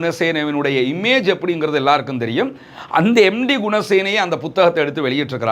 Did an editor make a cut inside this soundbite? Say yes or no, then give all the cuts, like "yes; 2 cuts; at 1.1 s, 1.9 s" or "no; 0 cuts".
no; 0 cuts